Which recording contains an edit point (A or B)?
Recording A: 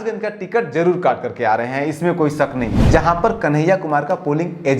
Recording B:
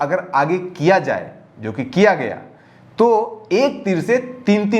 A